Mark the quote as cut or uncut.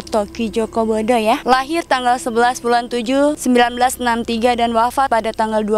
cut